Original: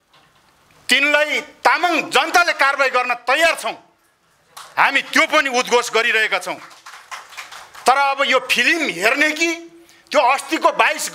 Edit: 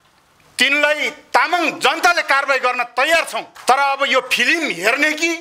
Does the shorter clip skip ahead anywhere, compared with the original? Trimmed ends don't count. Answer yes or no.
yes